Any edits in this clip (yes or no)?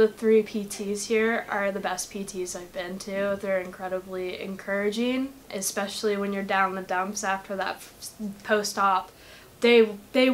no